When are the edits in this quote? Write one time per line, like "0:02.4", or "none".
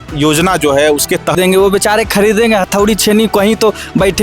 0:01.3